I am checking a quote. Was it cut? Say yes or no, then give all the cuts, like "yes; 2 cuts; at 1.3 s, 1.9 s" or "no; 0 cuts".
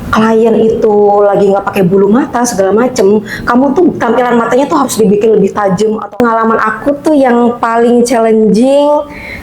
yes; 1 cut; at 6.1 s